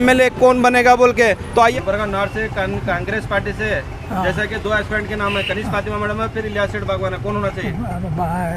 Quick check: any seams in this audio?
yes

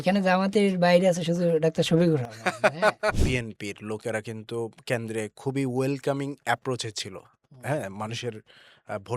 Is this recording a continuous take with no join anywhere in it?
no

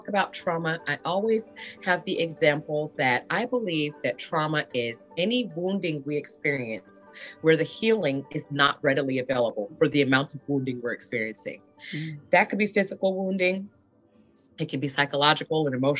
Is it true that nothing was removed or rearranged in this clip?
yes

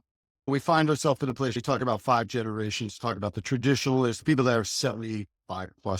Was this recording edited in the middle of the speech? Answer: yes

